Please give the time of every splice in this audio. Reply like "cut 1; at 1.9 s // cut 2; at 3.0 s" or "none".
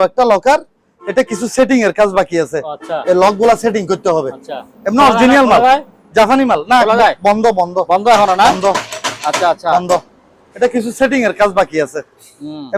none